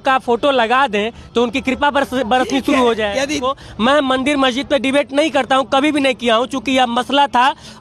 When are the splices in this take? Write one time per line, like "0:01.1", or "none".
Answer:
0:03.5